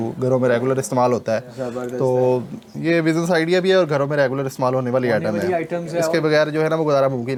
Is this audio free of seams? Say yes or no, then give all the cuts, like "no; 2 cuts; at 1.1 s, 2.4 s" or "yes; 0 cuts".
yes; 0 cuts